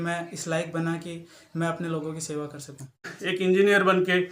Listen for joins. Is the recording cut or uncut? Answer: cut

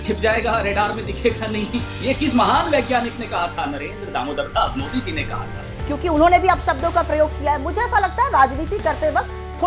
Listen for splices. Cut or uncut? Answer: cut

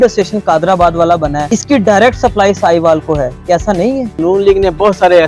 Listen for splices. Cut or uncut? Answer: cut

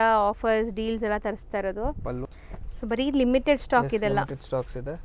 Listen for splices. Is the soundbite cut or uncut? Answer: cut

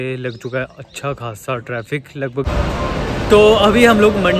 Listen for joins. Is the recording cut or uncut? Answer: cut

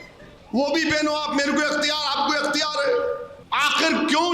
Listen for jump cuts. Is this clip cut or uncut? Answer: cut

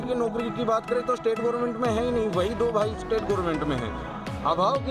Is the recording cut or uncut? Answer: uncut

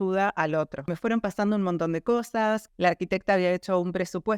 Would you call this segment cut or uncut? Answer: cut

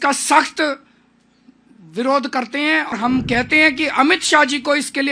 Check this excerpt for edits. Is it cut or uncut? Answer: cut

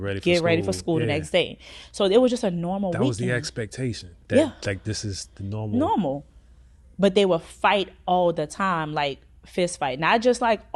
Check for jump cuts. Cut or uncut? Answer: uncut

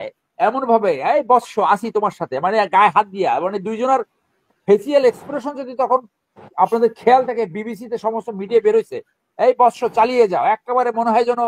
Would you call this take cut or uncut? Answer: uncut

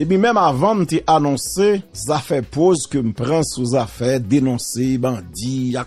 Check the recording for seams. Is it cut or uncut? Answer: cut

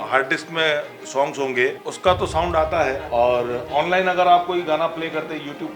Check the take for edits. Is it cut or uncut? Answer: cut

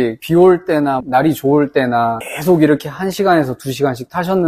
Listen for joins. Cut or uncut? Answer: cut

